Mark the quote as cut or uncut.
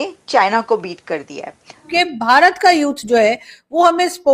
cut